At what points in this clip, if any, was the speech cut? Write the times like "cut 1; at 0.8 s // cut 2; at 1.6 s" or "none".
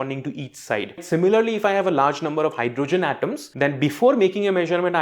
cut 1; at 1.0 s // cut 2; at 3.4 s